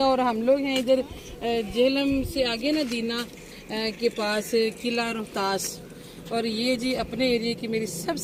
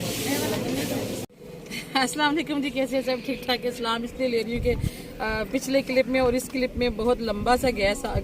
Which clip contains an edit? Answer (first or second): second